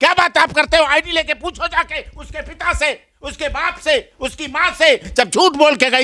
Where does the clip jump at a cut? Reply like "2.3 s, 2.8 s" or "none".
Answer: 5.1 s